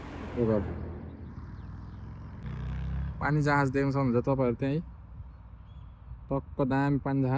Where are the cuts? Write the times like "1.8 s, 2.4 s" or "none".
2.4 s